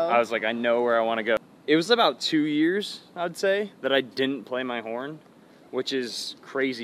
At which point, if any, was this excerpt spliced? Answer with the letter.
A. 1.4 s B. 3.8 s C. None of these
A